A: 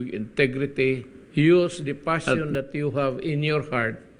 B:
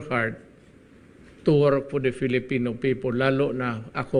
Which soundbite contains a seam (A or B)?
A